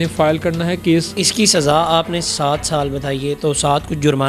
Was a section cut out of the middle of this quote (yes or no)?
yes